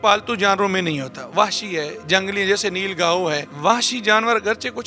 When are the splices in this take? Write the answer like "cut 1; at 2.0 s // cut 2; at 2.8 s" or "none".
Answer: cut 1; at 3.5 s